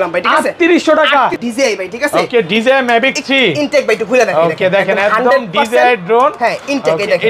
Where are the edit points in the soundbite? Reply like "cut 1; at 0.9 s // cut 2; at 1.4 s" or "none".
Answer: cut 1; at 1.3 s